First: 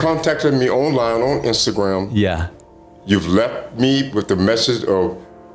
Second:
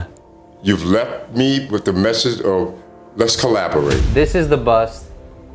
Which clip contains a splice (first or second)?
second